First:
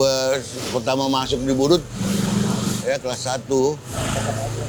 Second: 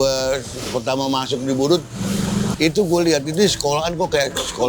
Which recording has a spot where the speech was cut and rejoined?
second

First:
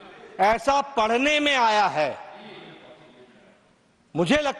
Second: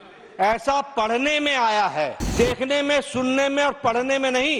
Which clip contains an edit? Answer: second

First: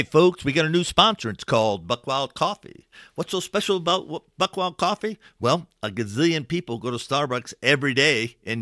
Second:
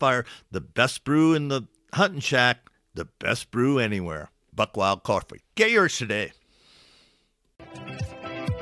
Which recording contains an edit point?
second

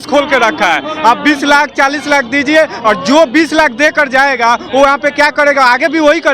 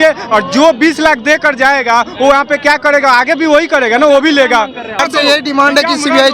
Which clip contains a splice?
second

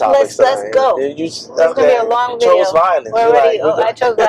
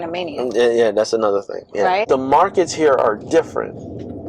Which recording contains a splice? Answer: second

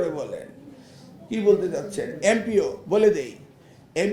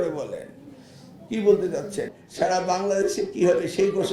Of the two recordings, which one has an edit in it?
second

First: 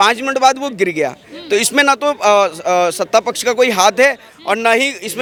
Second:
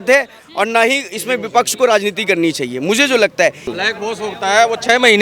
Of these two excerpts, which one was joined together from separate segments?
second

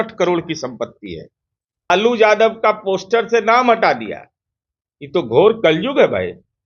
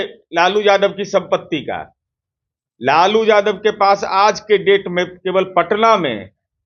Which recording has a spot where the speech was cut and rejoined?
first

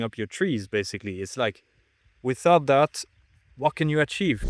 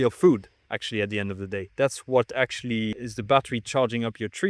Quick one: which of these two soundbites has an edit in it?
second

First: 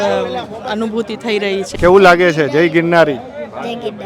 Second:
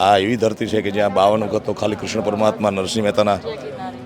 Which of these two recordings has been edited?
first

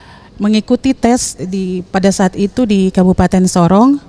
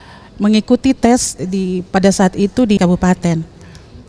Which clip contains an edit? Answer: second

